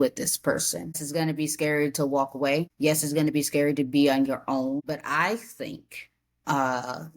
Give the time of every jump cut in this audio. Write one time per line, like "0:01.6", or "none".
0:01.0
0:02.7
0:04.8